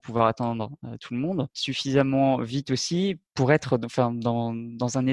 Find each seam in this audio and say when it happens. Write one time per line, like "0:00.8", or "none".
0:01.6